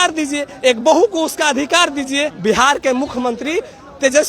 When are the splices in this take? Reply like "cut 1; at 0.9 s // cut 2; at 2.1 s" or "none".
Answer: cut 1; at 2.3 s